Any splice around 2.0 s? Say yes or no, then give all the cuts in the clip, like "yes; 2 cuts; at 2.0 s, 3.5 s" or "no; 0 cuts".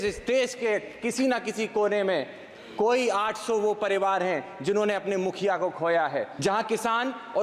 no; 1 cut; at 6.3 s